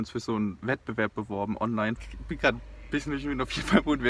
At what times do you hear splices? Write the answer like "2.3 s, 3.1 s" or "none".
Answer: 2.0 s